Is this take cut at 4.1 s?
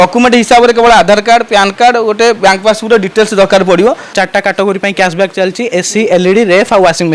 yes; 1 cut; at 4.1 s

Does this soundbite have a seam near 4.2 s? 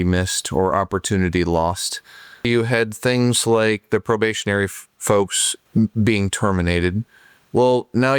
no; 2 cuts; at 2.5 s, 5.5 s

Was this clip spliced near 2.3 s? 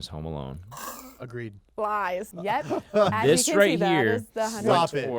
yes; 1 cut; at 2.3 s

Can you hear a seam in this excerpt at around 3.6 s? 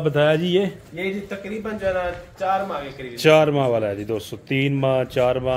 no; 0 cuts

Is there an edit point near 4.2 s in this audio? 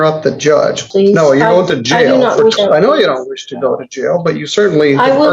no; 2 cuts; at 0.8 s, 2.6 s

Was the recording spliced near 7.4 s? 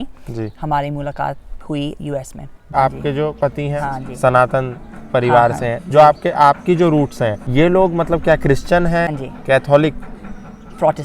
yes; 4 cuts; at 2.6 s, 3.7 s, 7.4 s, 9.2 s

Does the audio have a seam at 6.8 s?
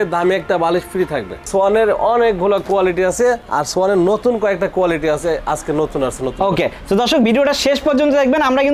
no; 1 cut; at 1.5 s

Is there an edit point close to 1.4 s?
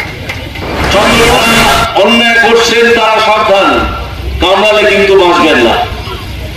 yes; 1 cut; at 1.4 s

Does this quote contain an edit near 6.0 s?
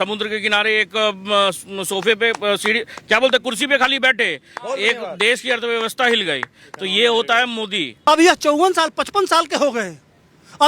no; 1 cut; at 7.8 s

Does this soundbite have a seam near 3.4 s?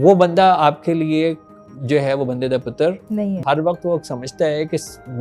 yes; 1 cut; at 3.4 s

